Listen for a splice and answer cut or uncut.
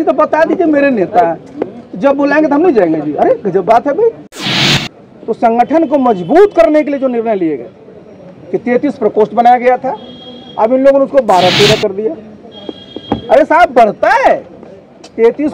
cut